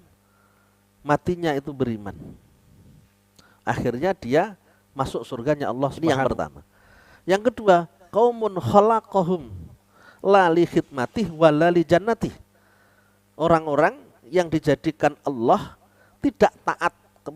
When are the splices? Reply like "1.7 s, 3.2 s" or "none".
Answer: 5.9 s